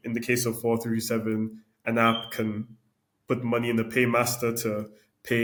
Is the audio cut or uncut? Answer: uncut